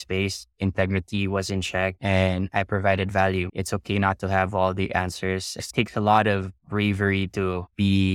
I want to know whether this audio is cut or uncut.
cut